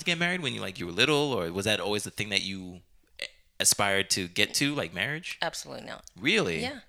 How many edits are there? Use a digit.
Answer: 0